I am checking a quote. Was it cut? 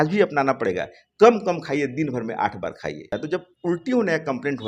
yes; 1 cut; at 3.1 s

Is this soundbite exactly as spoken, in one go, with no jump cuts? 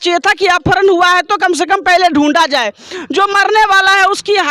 no; 1 cut; at 2.9 s

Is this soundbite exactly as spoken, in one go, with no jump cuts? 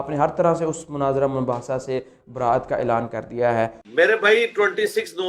yes; 0 cuts

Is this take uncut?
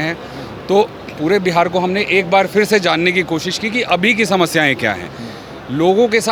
yes; 0 cuts

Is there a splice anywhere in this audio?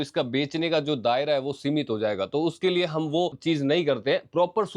no; 0 cuts

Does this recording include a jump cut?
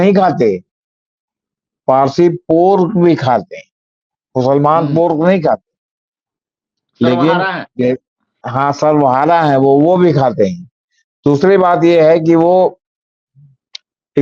no; 0 cuts

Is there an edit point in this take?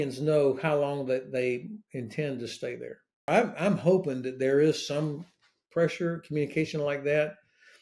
yes; 1 cut; at 3.3 s

